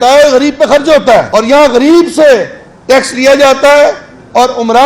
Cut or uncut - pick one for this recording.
cut